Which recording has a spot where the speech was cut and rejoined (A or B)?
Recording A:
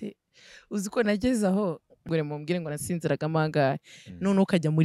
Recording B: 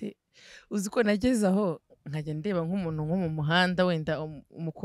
A